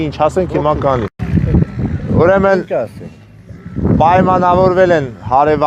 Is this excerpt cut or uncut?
cut